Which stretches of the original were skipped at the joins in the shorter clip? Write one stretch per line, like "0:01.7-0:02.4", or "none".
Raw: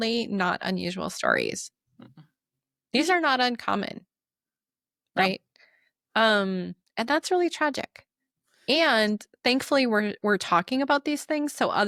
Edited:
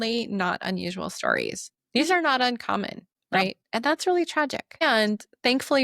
0:01.7-0:02.7
0:04.6-0:06.8
0:08.1-0:08.8